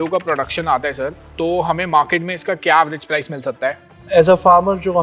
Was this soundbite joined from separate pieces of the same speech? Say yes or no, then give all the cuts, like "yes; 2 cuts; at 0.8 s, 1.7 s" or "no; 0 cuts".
no; 0 cuts